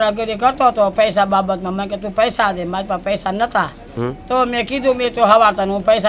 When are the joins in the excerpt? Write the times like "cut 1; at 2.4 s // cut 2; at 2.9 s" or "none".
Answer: none